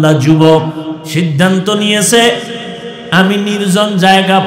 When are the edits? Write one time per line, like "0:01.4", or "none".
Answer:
0:01.0